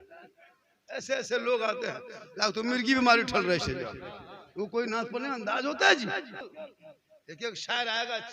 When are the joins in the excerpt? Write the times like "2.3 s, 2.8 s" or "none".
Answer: 6.6 s